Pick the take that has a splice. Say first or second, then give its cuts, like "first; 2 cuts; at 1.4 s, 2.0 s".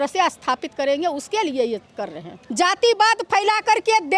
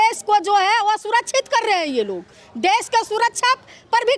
first; 1 cut; at 2.4 s